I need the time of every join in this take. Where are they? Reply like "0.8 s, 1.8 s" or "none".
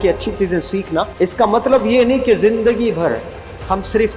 1.1 s